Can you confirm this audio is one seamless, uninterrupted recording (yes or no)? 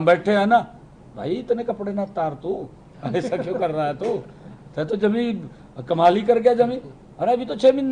yes